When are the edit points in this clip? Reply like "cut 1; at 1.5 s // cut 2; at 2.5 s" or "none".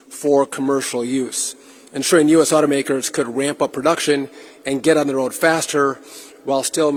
none